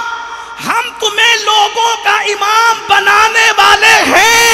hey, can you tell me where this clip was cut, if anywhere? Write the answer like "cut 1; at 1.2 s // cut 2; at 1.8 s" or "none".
none